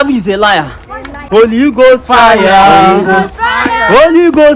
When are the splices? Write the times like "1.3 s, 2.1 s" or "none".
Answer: none

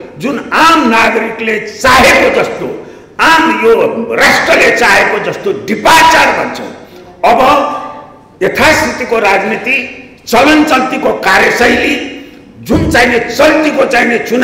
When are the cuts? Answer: none

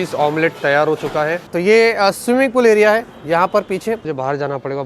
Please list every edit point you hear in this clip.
1.5 s, 4.1 s

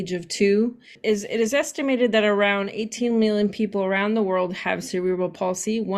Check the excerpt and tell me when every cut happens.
1.0 s

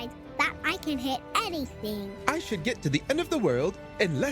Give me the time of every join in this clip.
2.1 s

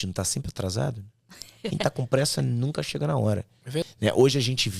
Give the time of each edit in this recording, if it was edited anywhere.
3.9 s

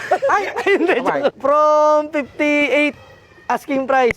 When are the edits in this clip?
1.3 s

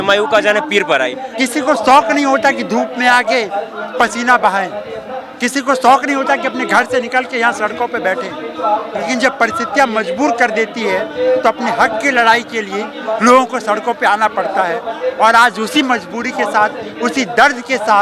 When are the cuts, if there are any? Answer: 1.2 s

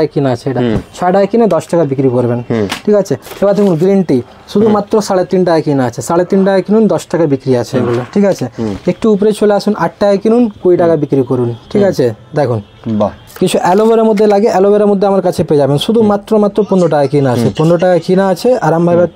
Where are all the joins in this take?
3.3 s, 13.2 s

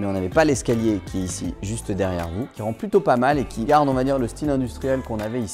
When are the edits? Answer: 2.5 s, 3.7 s

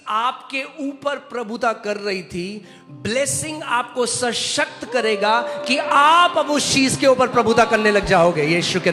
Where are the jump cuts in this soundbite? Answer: none

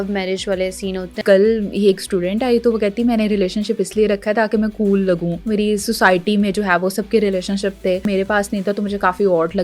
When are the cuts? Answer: 1.2 s, 5.3 s, 8.0 s

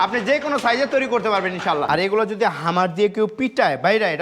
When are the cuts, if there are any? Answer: 1.9 s

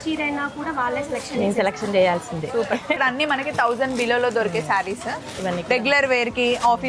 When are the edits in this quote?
3.0 s

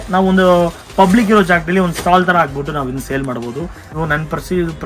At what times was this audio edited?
3.8 s

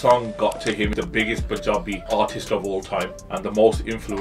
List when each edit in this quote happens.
0.9 s, 2.1 s, 3.2 s

